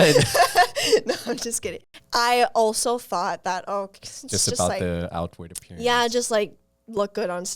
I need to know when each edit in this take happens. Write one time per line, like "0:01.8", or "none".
0:01.8